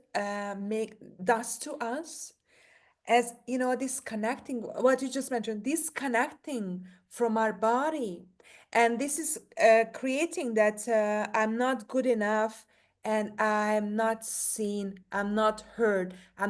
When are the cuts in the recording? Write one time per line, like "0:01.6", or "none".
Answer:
none